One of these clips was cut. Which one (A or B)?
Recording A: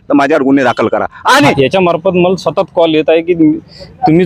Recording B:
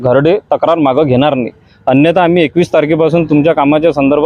A